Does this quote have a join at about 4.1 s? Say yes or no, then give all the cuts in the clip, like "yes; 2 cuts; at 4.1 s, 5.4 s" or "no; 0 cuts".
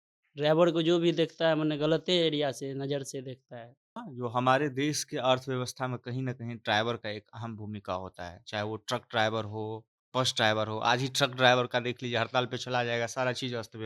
yes; 1 cut; at 4.1 s